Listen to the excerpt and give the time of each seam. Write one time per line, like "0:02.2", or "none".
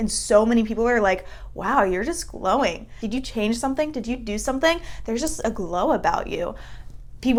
none